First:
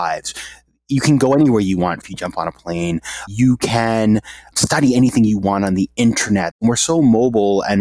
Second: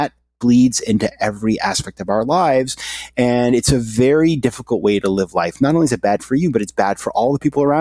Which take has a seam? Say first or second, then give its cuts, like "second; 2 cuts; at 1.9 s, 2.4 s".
first; 4 cuts; at 2.1 s, 3.3 s, 4.5 s, 6.5 s